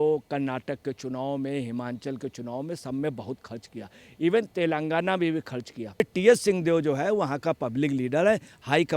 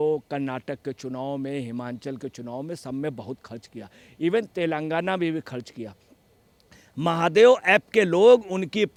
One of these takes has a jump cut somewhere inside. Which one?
first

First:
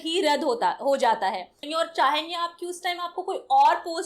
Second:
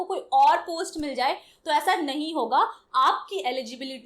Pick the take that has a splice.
first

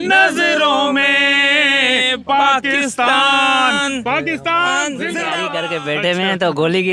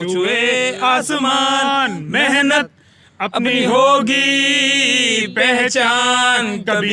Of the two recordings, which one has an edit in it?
first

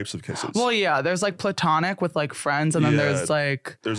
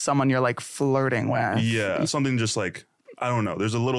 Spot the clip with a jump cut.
second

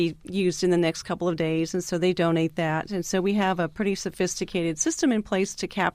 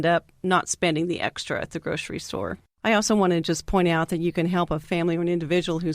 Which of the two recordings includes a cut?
second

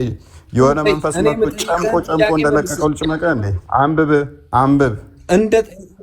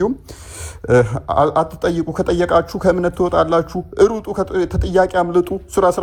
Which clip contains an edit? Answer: first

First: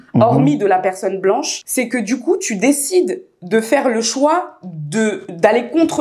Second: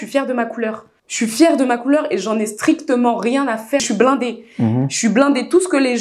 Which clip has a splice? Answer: second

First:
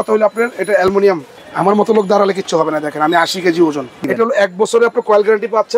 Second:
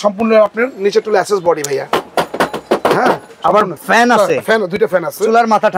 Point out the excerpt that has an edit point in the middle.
first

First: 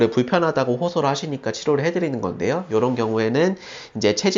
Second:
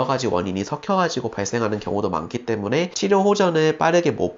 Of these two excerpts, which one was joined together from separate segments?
second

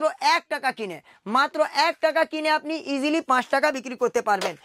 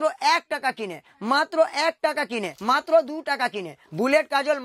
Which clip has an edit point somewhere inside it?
second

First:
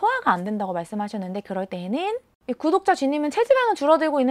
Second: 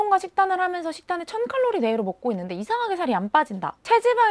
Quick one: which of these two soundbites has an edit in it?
first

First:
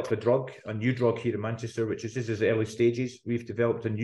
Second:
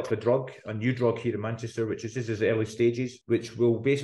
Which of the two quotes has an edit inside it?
second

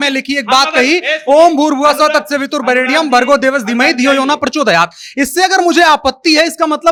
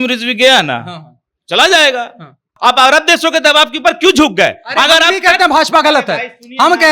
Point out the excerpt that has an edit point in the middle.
second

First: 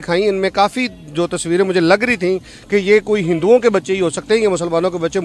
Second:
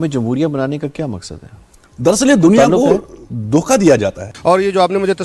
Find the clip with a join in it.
second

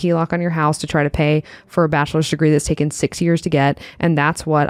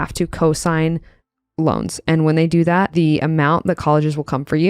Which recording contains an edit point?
second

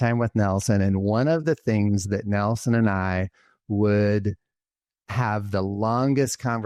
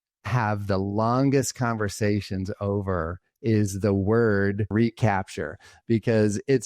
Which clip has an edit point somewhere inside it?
second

